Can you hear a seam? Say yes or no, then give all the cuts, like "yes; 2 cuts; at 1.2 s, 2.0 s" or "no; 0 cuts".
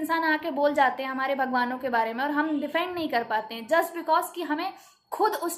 no; 0 cuts